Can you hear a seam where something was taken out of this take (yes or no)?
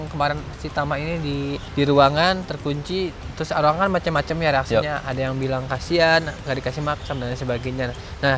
no